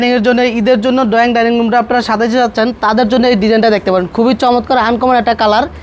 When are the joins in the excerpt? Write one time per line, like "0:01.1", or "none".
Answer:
none